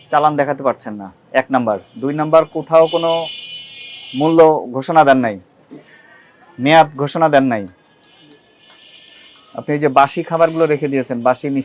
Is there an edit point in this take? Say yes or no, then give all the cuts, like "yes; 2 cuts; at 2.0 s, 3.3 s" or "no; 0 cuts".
no; 0 cuts